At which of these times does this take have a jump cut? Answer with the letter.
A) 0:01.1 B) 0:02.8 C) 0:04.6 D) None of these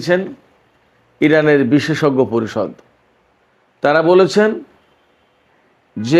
D